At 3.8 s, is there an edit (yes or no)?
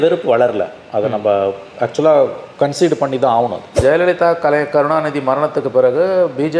yes